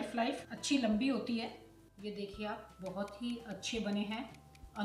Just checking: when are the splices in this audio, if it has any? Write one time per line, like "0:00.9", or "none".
0:01.9